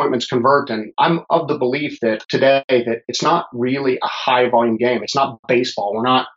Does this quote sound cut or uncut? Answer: cut